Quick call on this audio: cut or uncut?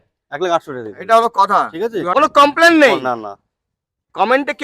cut